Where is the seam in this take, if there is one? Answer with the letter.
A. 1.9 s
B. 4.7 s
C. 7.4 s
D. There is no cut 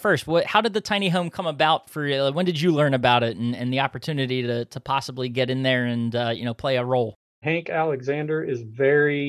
C